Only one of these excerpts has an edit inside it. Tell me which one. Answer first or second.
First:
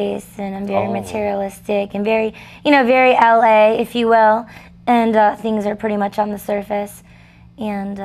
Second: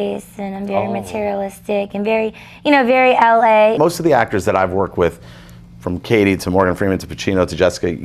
second